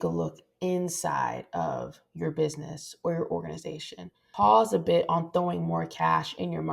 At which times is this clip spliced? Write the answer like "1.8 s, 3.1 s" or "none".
4.2 s